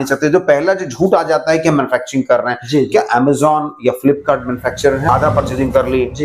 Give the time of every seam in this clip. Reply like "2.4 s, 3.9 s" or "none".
5.1 s